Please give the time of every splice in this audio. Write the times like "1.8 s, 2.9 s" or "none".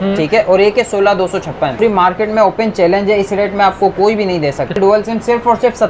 1.8 s, 4.8 s

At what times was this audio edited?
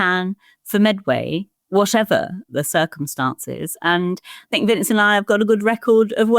2.5 s

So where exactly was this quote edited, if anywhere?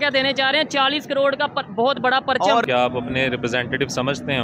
2.6 s

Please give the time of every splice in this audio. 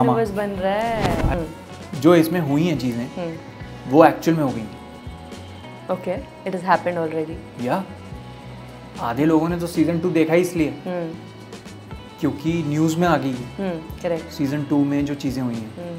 1.3 s

